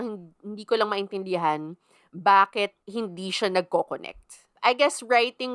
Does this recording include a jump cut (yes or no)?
yes